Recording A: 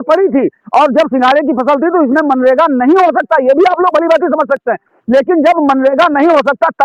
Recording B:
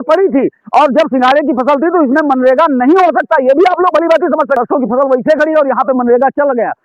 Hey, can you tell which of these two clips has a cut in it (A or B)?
B